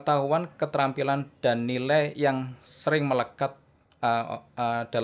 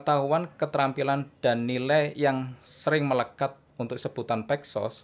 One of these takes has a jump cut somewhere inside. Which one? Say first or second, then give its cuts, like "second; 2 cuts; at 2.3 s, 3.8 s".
second; 1 cut; at 3.7 s